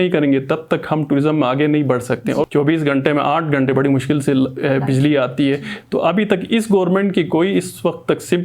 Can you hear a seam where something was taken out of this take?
yes; 1 cut; at 2.5 s

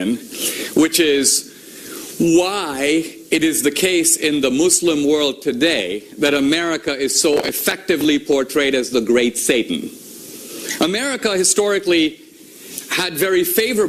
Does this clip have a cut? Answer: no; 0 cuts

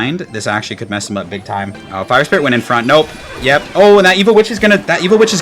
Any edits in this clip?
yes; 1 cut; at 1.8 s

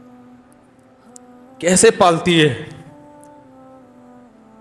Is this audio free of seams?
no; 1 cut; at 3.4 s

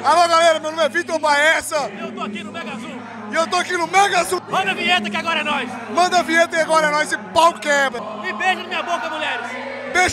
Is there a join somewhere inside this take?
yes; 2 cuts; at 4.4 s, 8.0 s

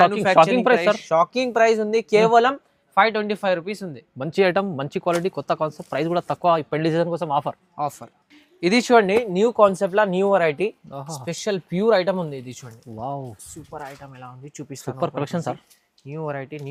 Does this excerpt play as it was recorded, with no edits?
yes; 0 cuts

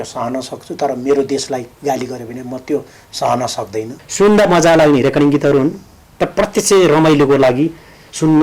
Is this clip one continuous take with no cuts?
no; 1 cut; at 4.0 s

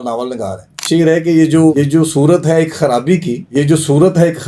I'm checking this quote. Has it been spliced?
yes; 3 cuts; at 0.8 s, 1.7 s, 3.4 s

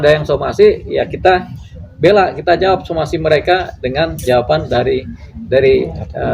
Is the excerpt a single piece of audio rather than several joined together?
yes; 0 cuts

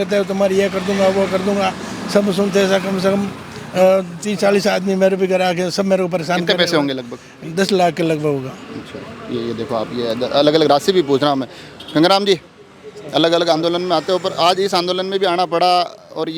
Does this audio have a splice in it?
no; 0 cuts

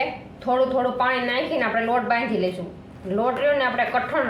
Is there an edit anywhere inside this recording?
no; 0 cuts

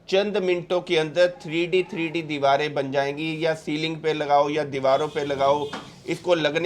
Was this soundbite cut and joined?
no; 0 cuts

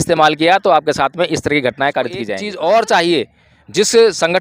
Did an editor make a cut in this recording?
yes; 1 cut; at 2.4 s

